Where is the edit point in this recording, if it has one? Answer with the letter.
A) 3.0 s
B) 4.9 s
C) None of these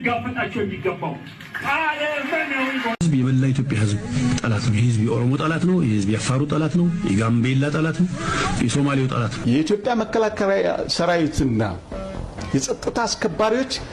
A